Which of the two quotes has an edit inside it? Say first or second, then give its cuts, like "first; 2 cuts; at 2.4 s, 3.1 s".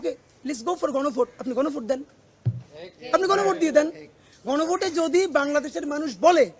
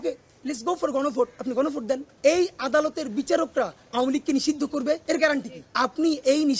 second; 3 cuts; at 2.1 s, 5.0 s, 5.6 s